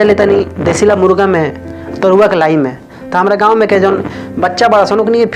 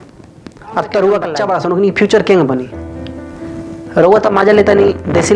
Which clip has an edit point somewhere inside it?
second; 1 cut; at 1.4 s

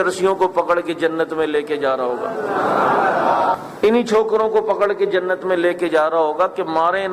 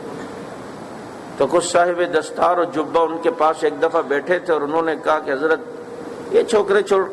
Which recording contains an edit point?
first; 1 cut; at 3.6 s

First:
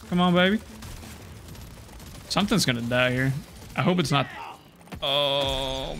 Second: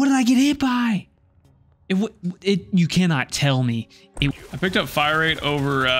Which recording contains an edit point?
second; 1 cut; at 4.3 s

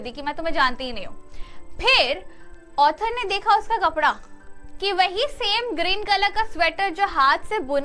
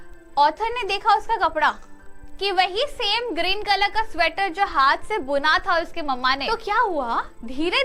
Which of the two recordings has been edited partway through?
second; 1 cut; at 6.4 s

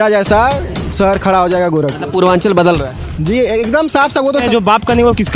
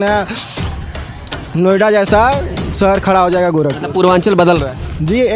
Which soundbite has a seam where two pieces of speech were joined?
first; 1 cut; at 4.4 s

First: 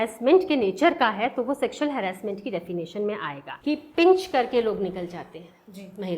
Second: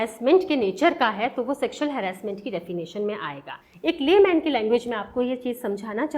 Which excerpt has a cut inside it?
first; 1 cut; at 3.4 s

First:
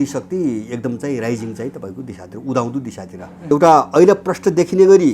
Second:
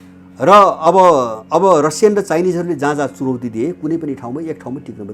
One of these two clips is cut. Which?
first; 1 cut; at 3.5 s

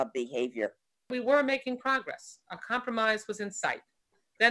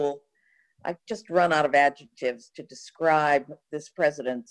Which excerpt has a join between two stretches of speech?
first; 1 cut; at 1.1 s

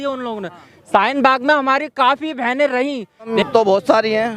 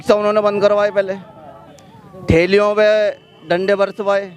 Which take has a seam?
first; 1 cut; at 3.3 s

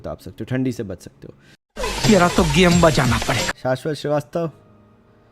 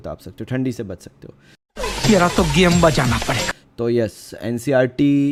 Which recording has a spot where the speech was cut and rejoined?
first; 1 cut; at 3.5 s

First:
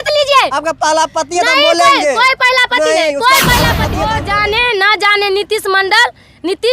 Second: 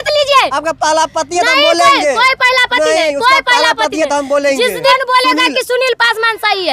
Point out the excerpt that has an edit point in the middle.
first; 1 cut; at 4.1 s

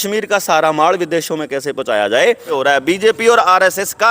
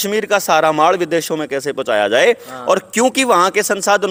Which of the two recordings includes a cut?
first; 1 cut; at 2.5 s

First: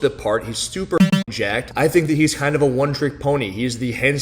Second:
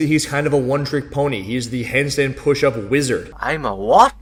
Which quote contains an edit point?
first; 1 cut; at 1.1 s

